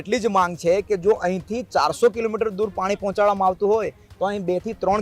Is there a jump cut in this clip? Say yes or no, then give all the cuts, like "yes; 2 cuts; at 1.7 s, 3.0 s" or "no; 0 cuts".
no; 0 cuts